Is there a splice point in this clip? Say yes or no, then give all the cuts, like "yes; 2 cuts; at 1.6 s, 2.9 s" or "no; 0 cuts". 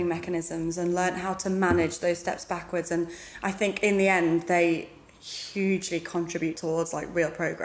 yes; 1 cut; at 6.6 s